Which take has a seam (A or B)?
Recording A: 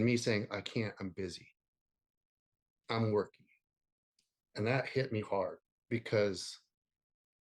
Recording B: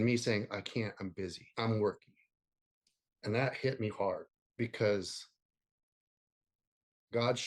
B